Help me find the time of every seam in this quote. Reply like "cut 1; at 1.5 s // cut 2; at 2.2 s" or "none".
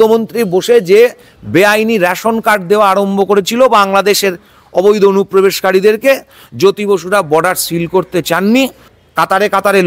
cut 1; at 8.9 s